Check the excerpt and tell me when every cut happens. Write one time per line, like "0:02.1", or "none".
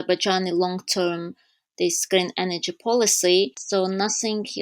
0:03.6